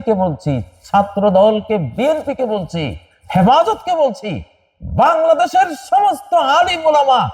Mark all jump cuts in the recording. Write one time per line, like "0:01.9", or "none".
none